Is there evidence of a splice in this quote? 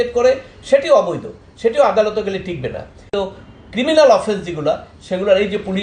yes; 1 cut; at 3.0 s

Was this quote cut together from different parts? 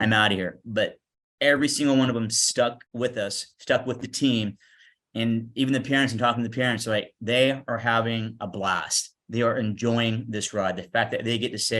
yes; 1 cut; at 2.8 s

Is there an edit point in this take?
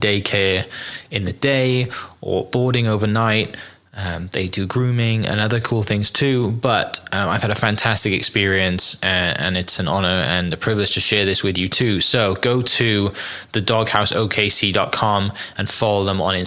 no; 0 cuts

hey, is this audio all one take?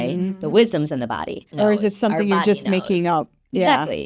no; 1 cut; at 1.5 s

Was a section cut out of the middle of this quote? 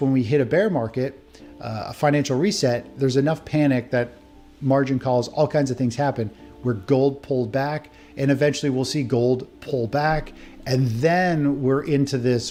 no; 0 cuts

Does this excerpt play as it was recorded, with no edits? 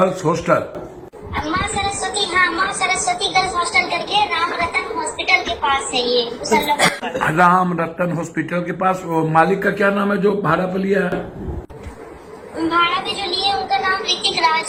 yes; 0 cuts

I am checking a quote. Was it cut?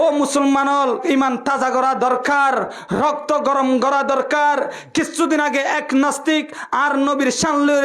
yes; 1 cut; at 1.0 s

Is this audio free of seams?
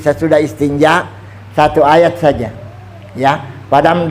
yes; 0 cuts

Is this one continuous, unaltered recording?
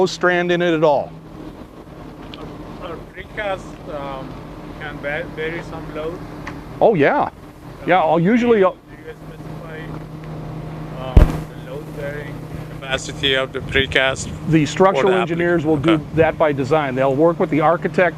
yes; 0 cuts

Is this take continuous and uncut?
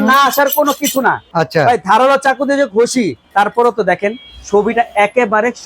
no; 2 cuts; at 1.3 s, 3.2 s

